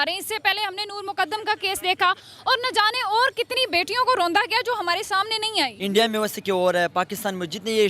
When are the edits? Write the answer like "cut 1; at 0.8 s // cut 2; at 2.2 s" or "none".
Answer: cut 1; at 5.8 s